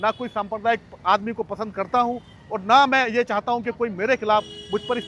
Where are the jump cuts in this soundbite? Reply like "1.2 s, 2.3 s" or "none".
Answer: none